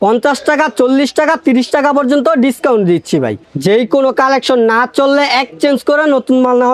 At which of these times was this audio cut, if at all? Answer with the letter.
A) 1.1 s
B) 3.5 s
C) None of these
B